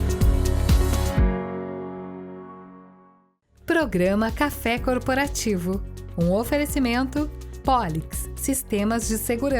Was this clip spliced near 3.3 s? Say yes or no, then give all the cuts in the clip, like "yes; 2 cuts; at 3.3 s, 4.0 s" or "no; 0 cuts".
yes; 1 cut; at 3.3 s